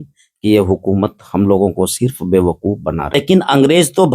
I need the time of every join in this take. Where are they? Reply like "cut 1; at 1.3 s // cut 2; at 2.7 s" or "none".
cut 1; at 3.1 s